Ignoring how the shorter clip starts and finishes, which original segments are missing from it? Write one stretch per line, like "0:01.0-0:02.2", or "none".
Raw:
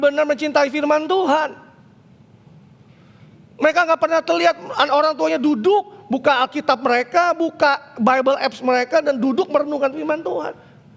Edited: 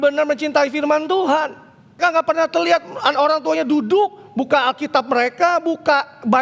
0:02.0-0:03.7

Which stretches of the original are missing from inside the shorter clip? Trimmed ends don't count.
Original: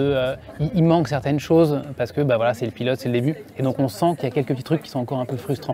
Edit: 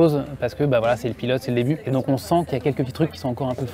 0:03.4-0:03.5

